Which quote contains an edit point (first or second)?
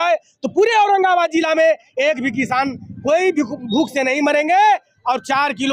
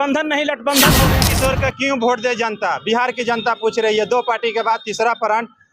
second